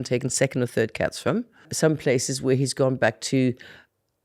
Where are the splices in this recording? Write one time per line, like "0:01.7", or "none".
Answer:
0:01.7